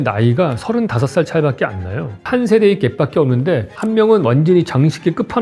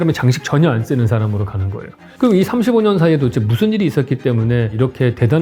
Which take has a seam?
first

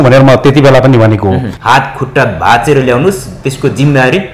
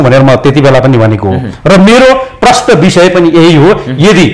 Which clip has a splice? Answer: first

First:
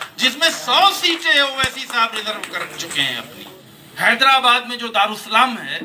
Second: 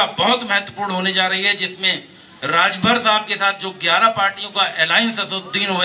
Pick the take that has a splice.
first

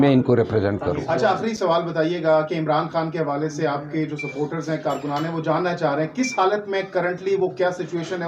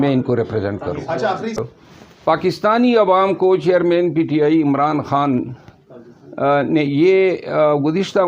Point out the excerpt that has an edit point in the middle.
second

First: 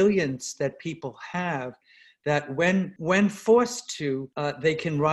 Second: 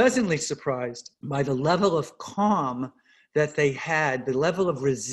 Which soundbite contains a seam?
first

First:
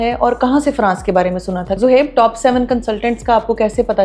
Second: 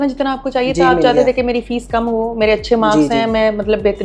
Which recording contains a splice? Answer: first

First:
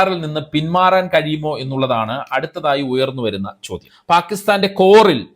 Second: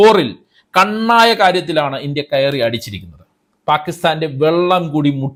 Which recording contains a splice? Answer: first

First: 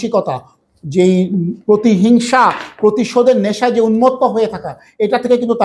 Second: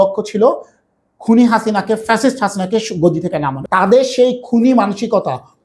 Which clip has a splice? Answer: second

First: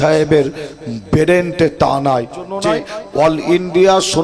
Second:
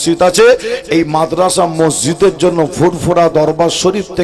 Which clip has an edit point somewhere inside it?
first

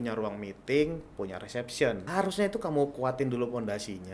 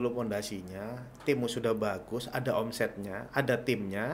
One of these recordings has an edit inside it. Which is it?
first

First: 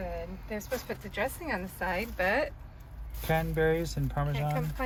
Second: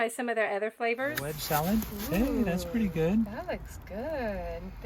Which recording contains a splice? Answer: second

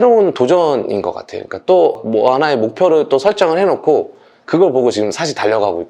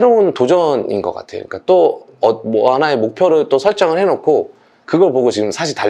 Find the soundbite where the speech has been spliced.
first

